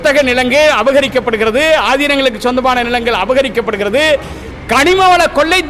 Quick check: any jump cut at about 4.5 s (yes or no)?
no